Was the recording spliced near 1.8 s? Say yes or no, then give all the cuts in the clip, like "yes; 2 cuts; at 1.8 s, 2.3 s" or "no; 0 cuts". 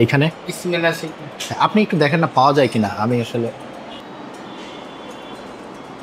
no; 1 cut; at 4.0 s